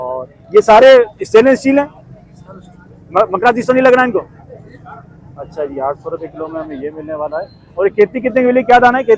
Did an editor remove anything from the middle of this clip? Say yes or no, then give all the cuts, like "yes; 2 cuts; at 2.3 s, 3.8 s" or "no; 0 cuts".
no; 0 cuts